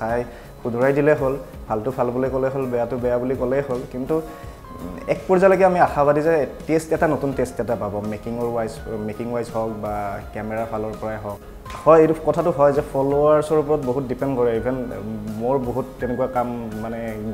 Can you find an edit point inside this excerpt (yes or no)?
yes